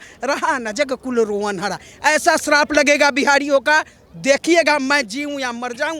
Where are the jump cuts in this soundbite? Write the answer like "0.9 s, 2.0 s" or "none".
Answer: none